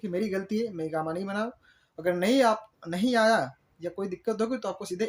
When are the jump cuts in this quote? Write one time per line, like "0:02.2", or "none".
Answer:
none